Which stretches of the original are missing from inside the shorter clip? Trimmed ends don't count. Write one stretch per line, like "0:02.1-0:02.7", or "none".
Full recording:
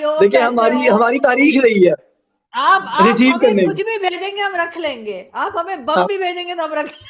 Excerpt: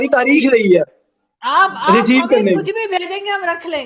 none